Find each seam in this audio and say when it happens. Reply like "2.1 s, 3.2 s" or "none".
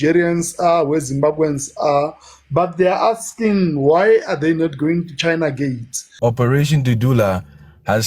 6.1 s